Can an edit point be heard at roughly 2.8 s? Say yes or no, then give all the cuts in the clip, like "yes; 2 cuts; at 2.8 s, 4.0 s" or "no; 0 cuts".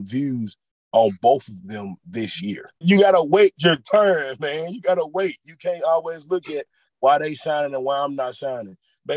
yes; 1 cut; at 2.8 s